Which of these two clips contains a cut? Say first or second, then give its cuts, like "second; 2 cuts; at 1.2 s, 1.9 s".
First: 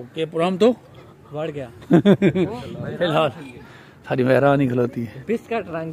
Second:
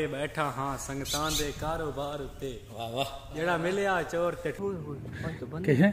second; 1 cut; at 4.6 s